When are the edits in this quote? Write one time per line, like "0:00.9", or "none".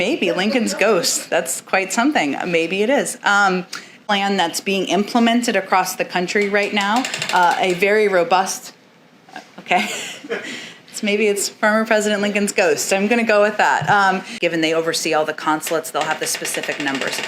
0:04.0
0:14.3